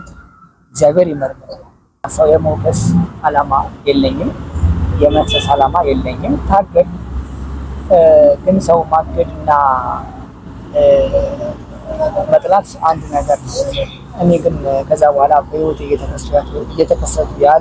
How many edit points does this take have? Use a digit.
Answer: 1